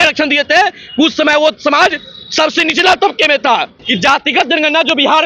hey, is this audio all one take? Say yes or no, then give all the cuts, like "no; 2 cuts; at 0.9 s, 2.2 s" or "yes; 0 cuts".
no; 1 cut; at 3.8 s